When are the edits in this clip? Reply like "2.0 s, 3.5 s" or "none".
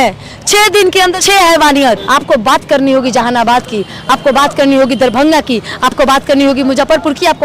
1.2 s, 2.0 s